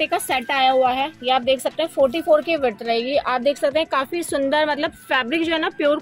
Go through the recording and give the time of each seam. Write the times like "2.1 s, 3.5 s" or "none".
none